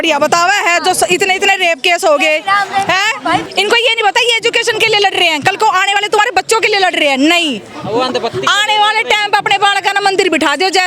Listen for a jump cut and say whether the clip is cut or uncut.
cut